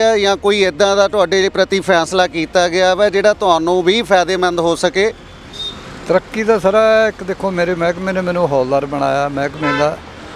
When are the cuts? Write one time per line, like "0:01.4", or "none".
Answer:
none